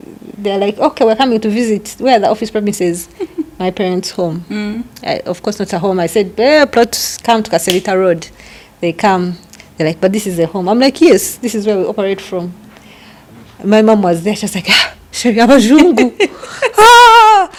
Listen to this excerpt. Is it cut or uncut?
uncut